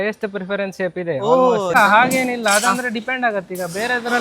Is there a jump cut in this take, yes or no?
yes